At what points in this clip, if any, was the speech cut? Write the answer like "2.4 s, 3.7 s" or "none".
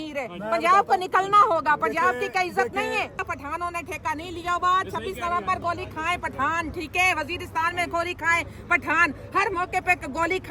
3.2 s